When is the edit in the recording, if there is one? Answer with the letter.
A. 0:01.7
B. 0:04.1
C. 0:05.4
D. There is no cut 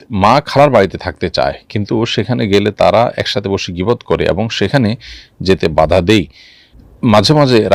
D